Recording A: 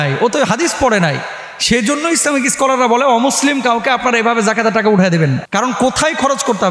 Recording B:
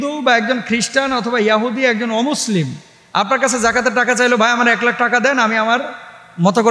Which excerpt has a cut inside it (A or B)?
A